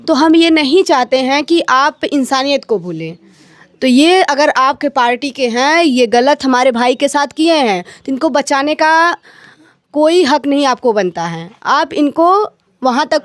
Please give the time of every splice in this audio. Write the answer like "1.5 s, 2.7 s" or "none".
none